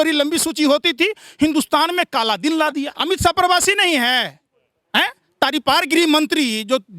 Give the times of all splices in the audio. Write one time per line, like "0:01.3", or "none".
0:02.9